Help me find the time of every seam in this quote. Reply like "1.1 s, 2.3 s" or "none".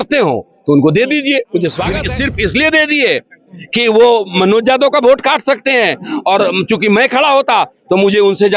1.9 s